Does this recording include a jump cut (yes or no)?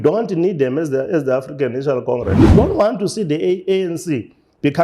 yes